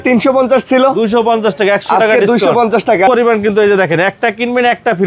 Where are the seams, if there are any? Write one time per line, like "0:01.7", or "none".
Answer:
0:03.1